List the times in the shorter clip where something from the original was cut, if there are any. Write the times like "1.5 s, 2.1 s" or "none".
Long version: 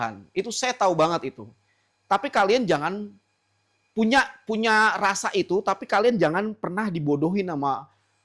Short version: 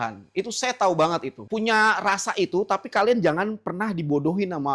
1.4 s